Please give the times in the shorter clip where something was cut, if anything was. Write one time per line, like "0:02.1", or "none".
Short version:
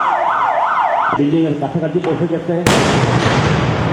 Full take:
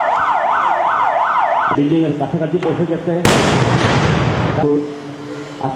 0:01.0

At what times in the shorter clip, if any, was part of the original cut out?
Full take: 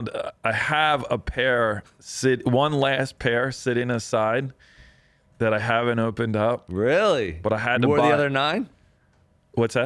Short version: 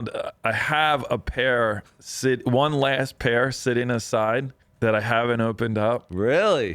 0:04.6

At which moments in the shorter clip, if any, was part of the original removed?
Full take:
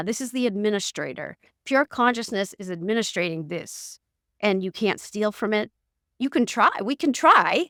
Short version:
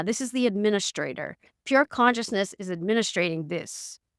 none

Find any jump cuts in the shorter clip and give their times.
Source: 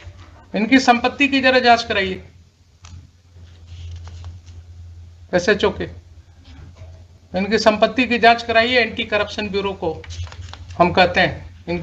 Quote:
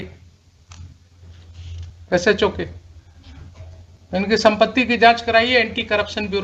0:01.9

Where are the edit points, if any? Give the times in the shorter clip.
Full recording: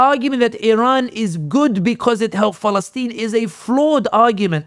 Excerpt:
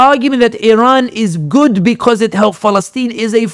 none

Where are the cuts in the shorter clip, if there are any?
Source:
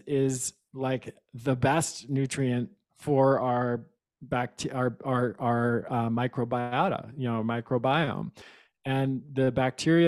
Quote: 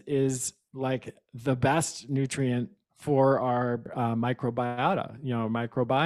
0:03.9

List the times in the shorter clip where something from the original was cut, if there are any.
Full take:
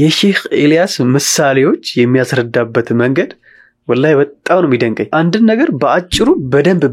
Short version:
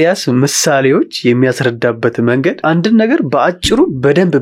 0:02.6

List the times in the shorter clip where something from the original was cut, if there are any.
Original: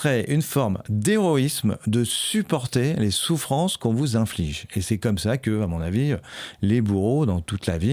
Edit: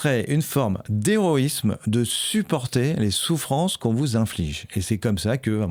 none

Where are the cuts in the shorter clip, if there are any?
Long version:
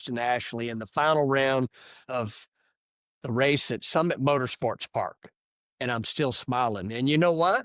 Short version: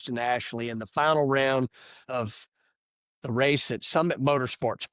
none

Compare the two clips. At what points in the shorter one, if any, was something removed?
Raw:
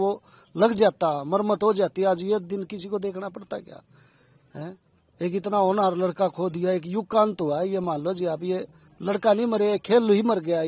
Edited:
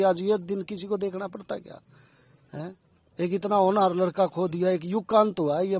none

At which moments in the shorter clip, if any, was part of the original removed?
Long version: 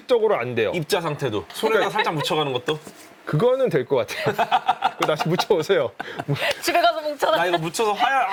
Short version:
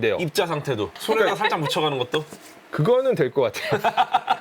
none

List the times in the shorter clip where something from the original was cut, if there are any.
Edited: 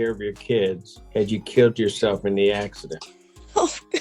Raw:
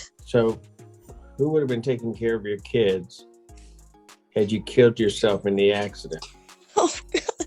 0:00.9

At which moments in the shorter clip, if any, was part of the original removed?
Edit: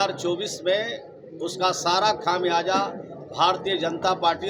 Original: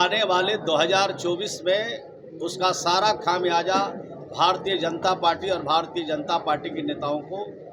none

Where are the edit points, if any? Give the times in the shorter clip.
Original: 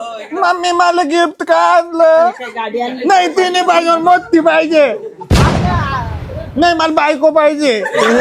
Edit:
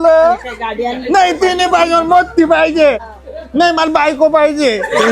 0:03.2

